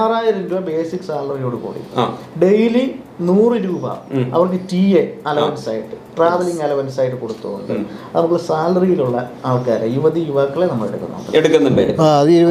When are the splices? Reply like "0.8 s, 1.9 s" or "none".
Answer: none